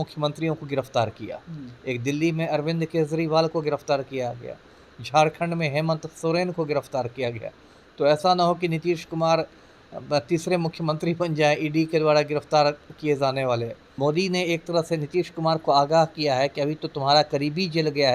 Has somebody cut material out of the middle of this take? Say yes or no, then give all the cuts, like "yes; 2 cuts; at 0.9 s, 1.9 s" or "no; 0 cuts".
yes; 1 cut; at 13.8 s